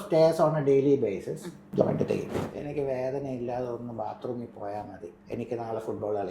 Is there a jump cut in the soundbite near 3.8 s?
no; 3 cuts; at 1.5 s, 2.4 s, 5.1 s

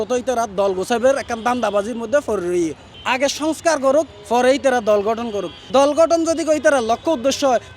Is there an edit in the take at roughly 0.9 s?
no; 2 cuts; at 2.9 s, 5.6 s

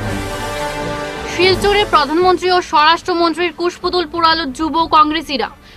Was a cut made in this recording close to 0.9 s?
yes; 1 cut; at 0.9 s

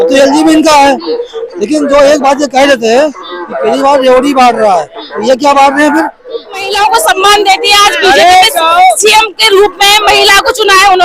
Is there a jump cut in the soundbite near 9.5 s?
no; 1 cut; at 6.7 s

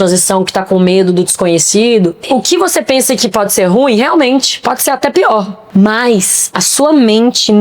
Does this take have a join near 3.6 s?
no; 2 cuts; at 2.3 s, 5.6 s

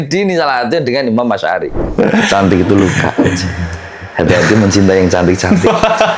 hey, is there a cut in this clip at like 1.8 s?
yes; 1 cut; at 1.8 s

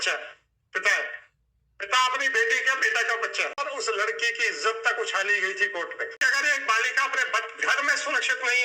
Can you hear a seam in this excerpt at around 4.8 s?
no; 2 cuts; at 3.6 s, 6.2 s

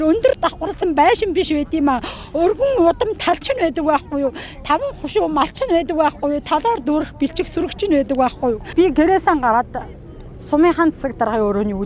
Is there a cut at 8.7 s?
yes; 1 cut; at 8.7 s

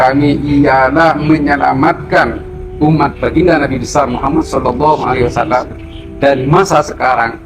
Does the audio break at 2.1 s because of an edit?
no; 0 cuts

